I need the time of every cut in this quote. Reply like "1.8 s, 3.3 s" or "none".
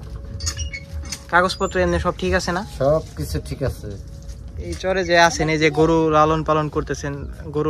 4.7 s